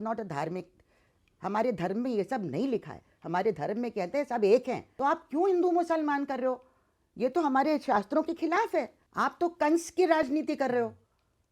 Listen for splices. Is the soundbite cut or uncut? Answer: cut